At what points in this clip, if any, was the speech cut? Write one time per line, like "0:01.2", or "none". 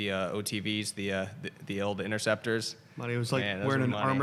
none